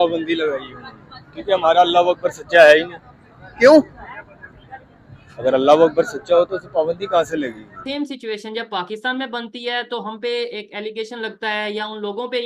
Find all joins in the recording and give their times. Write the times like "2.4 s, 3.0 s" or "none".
7.8 s